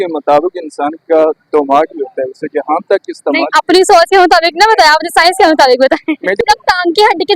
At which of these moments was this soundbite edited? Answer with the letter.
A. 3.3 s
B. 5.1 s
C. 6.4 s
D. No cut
C